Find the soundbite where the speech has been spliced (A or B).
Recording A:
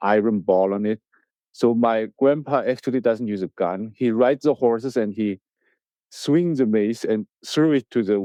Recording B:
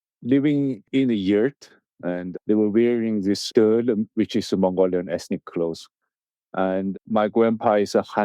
B